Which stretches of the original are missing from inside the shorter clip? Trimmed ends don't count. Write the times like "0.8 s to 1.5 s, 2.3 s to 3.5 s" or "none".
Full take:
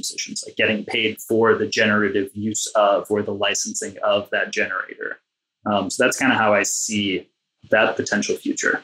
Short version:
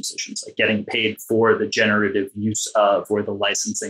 none

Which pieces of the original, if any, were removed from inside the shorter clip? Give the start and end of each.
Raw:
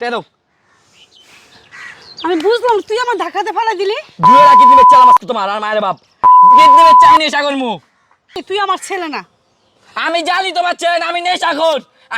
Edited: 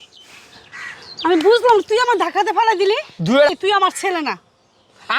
4.1 s to 8.0 s

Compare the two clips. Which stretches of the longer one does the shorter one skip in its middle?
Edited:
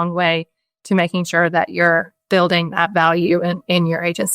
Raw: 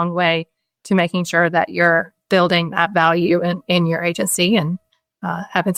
none

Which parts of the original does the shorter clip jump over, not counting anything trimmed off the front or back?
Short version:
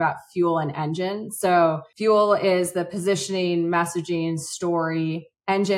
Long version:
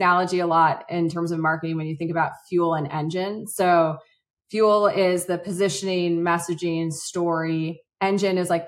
4.0 s to 4.4 s

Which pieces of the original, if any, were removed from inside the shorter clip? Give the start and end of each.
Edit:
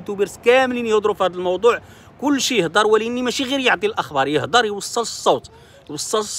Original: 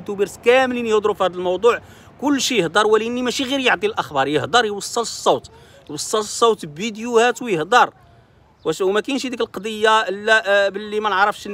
none

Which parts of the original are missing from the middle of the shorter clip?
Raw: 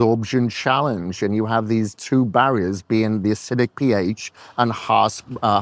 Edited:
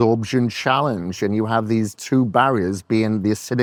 none

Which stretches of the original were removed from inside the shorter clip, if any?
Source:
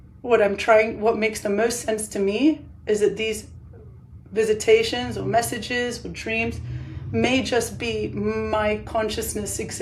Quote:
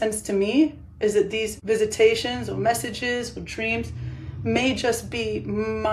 3.4 s to 4.2 s

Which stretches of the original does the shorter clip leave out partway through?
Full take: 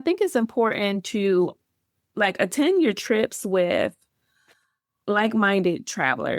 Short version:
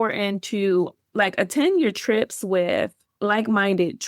1.6 s to 2.0 s, 4.1 s to 4.9 s

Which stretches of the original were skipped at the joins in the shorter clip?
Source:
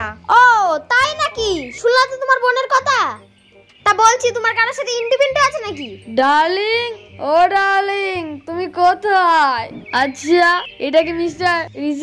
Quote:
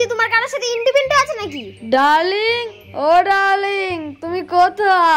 none

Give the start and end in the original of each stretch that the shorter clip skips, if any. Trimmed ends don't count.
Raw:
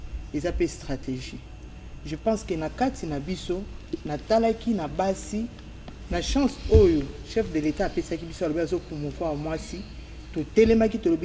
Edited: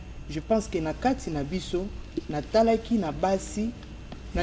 none

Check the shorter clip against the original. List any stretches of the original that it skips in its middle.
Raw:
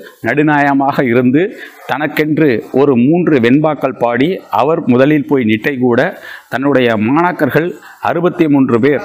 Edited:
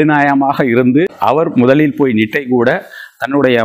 1.5 s to 4.5 s

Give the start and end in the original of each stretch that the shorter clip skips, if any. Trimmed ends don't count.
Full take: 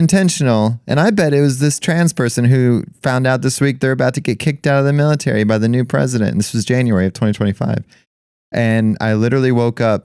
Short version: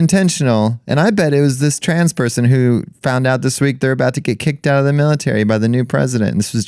none

